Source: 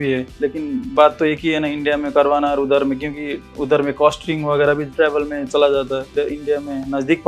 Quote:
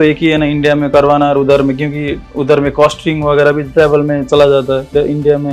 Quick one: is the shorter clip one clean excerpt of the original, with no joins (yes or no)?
yes